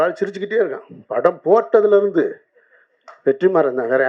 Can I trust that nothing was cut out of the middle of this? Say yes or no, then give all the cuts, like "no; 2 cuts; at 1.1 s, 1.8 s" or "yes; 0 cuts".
yes; 0 cuts